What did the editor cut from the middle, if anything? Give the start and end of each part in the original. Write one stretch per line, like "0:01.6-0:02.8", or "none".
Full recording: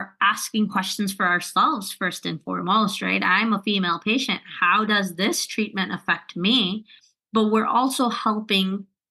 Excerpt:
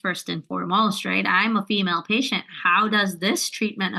none